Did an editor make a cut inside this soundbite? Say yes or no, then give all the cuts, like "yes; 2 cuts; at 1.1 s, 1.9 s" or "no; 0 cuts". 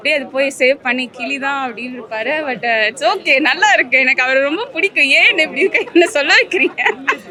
no; 0 cuts